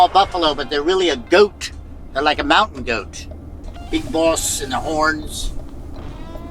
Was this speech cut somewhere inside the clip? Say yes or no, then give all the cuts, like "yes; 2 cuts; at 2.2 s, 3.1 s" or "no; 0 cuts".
no; 0 cuts